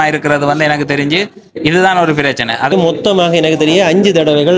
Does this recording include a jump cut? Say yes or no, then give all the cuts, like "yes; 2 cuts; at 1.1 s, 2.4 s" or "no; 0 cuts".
yes; 1 cut; at 2.7 s